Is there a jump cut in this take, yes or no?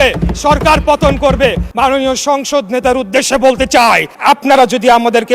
yes